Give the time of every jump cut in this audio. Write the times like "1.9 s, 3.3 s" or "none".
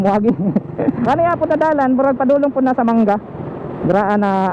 1.0 s